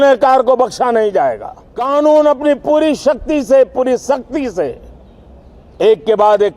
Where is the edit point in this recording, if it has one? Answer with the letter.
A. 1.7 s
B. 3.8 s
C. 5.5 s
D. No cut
A